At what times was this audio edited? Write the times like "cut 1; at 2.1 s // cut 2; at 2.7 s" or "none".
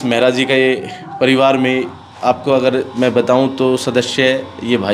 none